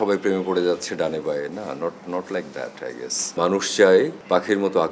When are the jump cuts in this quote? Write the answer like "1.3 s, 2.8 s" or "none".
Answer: 3.2 s